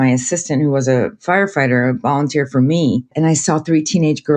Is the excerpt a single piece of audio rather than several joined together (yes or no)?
no